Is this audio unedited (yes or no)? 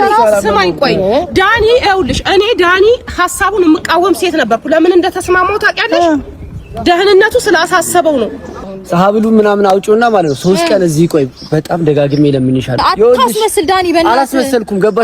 no